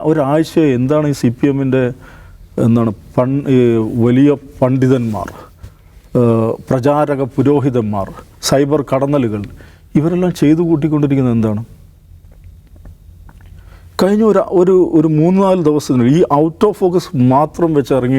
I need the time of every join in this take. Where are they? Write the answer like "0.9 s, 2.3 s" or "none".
none